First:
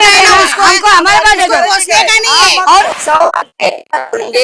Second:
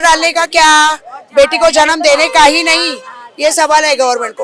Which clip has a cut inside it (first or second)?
first